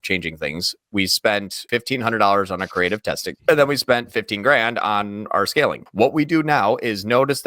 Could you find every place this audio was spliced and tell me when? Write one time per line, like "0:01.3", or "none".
0:01.6
0:03.3
0:05.8